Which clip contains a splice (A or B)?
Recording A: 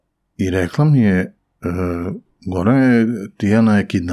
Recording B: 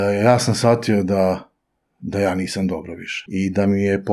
B